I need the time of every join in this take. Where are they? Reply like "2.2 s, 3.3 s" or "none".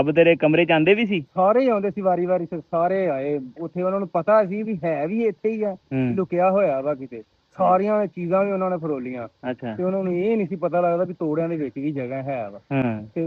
none